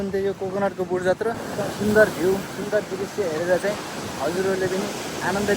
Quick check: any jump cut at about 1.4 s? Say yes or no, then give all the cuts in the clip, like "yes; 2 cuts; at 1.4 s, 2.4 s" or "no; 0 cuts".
yes; 1 cut; at 1.4 s